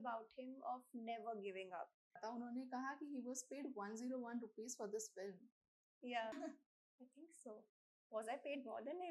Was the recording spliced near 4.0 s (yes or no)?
no